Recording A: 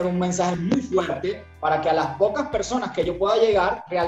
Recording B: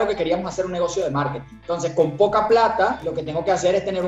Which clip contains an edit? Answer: B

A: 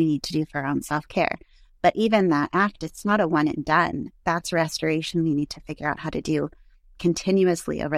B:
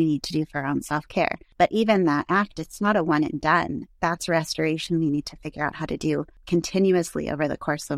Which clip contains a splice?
B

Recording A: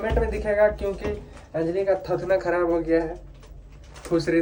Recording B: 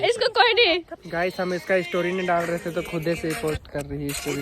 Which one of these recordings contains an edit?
B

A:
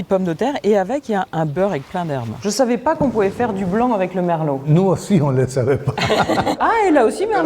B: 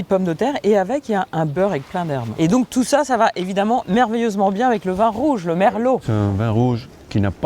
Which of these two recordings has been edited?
A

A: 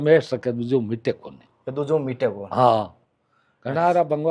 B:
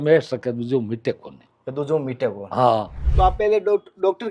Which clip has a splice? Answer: B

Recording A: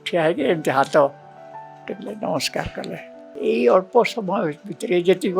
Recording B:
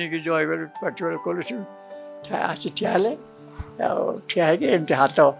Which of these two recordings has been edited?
A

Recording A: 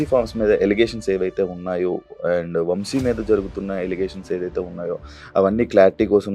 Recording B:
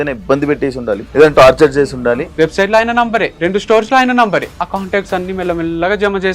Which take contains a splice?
B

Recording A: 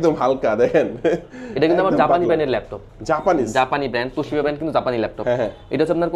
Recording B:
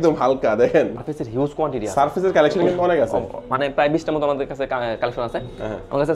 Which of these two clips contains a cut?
B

